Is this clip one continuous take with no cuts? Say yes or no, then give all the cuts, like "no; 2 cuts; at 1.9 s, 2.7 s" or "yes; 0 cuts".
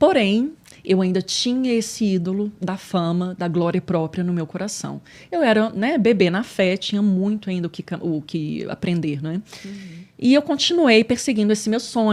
yes; 0 cuts